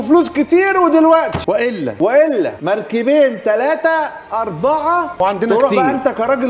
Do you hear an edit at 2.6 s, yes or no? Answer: yes